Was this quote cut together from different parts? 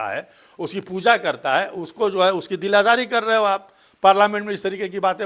no; 0 cuts

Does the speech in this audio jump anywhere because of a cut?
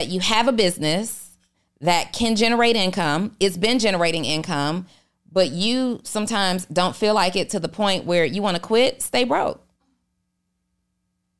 no; 0 cuts

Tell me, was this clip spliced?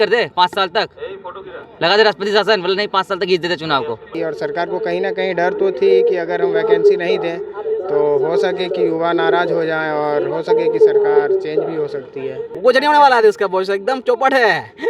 yes; 2 cuts; at 4.1 s, 12.4 s

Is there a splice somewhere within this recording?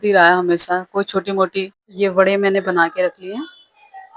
yes; 1 cut; at 1.8 s

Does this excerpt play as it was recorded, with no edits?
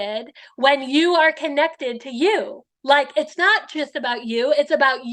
yes; 0 cuts

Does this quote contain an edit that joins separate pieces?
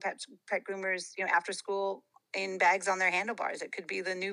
no; 0 cuts

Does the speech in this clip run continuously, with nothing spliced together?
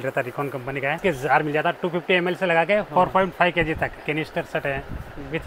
no; 3 cuts; at 1.0 s, 2.9 s, 4.0 s

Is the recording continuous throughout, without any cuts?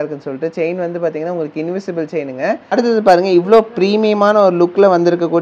no; 1 cut; at 2.6 s

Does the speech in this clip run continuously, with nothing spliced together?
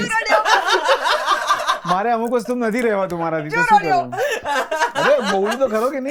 yes; 0 cuts

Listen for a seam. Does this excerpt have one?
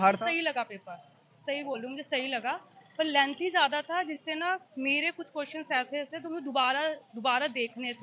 no; 0 cuts

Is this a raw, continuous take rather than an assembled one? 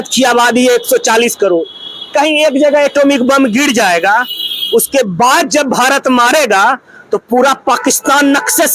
yes; 0 cuts

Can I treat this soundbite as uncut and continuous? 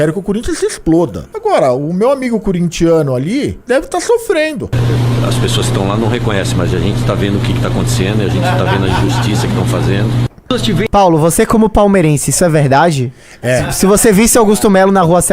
no; 3 cuts; at 1.2 s, 3.6 s, 4.8 s

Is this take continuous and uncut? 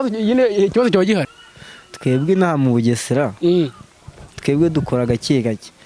no; 1 cut; at 1.3 s

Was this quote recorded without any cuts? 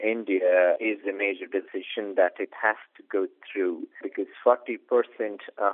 yes; 0 cuts

